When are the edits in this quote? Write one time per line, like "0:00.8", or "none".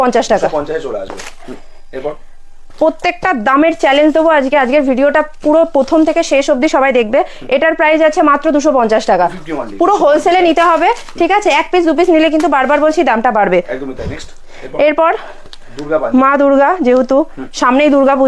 none